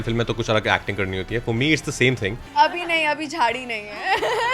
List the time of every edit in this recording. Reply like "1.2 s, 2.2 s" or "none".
2.4 s